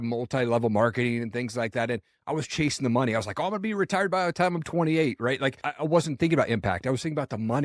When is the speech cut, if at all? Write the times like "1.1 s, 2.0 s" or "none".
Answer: 5.7 s